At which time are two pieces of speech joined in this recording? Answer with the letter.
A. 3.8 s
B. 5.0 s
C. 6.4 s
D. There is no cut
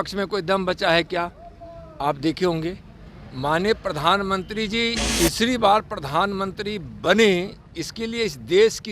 B